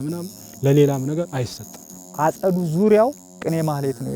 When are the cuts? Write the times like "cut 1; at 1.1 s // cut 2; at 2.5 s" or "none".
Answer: cut 1; at 2.0 s